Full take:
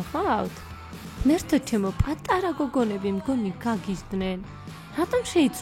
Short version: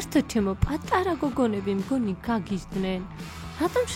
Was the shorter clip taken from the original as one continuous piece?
yes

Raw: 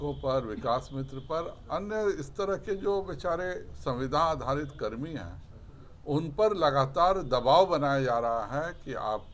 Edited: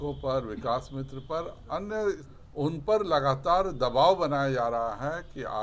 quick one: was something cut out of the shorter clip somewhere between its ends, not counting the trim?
yes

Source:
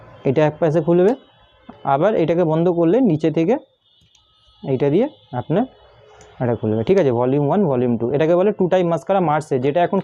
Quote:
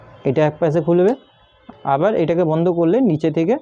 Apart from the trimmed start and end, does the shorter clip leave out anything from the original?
no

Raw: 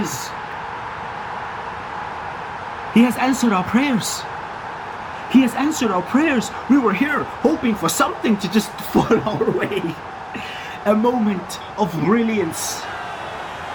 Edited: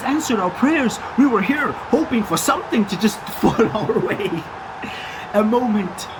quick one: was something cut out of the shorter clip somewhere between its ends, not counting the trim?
no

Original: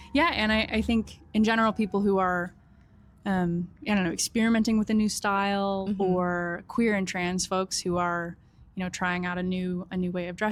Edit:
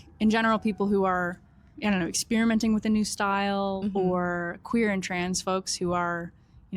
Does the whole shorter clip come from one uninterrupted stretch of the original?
no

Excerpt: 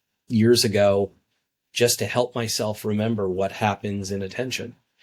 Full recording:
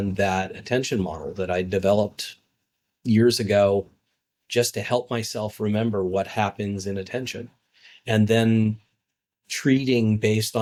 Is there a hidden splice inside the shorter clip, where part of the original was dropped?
no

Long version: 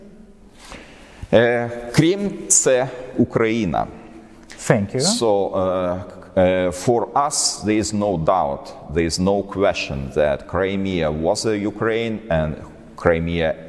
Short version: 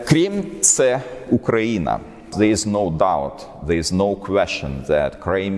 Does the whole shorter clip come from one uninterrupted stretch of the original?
no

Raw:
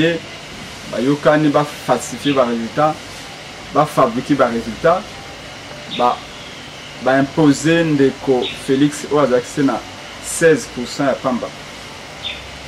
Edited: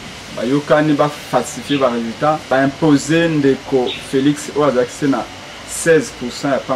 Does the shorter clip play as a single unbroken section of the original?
no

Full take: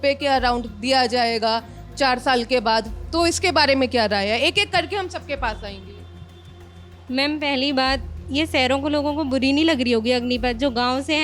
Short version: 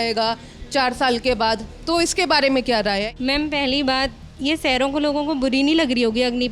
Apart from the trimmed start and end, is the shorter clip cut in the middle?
yes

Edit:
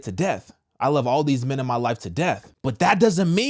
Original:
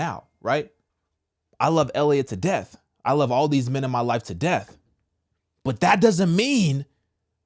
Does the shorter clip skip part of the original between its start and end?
yes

